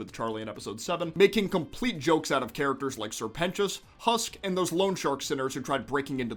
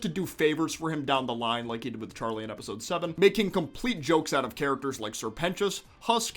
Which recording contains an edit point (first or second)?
second